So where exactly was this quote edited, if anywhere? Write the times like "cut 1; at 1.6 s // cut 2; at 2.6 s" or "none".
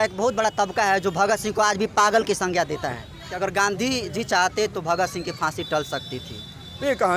cut 1; at 3.3 s